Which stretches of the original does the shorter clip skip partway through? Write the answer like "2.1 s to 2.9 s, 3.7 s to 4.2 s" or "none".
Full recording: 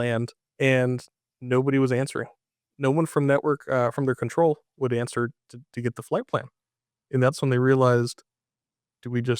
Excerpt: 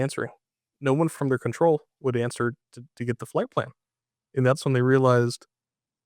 3.1 s to 3.9 s